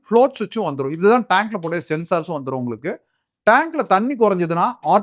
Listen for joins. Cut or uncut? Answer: uncut